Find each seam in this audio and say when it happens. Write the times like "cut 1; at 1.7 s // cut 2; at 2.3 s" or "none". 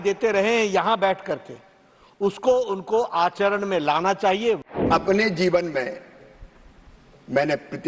cut 1; at 4.7 s